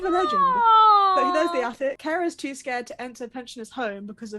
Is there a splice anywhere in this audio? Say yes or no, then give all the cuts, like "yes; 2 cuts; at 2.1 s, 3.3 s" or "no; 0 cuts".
yes; 1 cut; at 2.0 s